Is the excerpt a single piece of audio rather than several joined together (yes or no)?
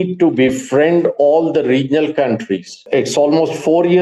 no